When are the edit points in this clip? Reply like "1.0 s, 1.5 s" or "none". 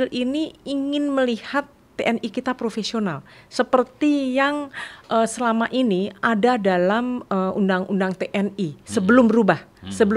none